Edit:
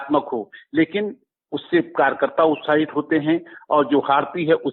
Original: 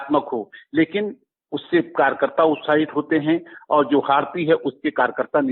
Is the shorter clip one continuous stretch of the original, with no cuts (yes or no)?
yes